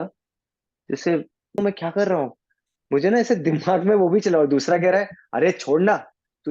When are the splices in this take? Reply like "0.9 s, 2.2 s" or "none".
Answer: 1.6 s